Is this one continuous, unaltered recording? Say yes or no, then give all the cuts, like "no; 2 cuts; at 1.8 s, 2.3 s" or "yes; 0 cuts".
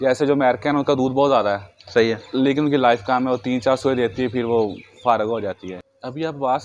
no; 1 cut; at 5.7 s